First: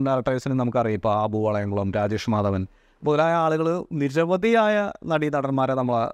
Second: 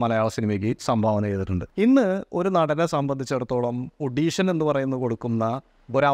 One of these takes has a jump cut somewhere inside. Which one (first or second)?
second